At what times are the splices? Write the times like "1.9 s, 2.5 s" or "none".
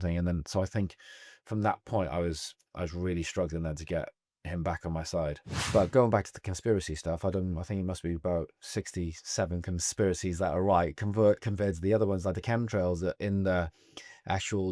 5.5 s

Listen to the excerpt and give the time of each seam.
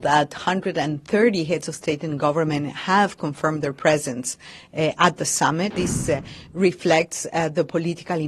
5.7 s

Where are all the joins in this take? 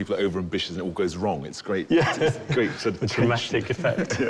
none

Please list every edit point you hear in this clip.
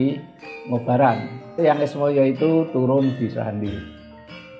1.6 s

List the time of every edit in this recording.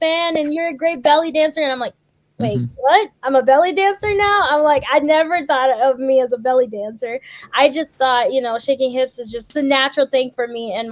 9.5 s

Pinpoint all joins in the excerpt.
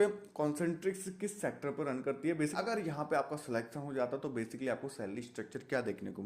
2.6 s

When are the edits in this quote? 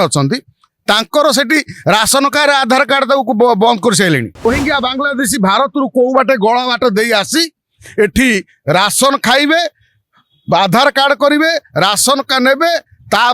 4.4 s

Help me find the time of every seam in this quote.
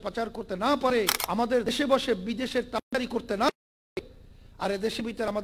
1.2 s

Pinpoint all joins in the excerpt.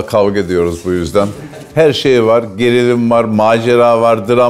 1.6 s

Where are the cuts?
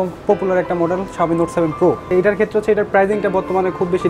2.1 s

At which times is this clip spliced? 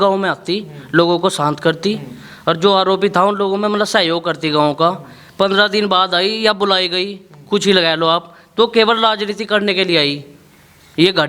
none

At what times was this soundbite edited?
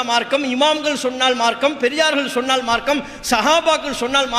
none

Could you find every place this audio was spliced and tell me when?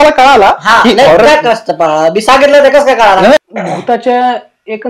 3.4 s

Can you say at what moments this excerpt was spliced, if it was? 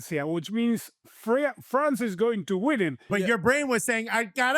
3.1 s

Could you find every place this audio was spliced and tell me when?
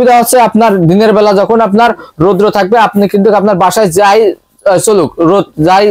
none

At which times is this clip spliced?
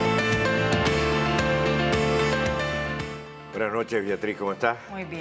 2.0 s

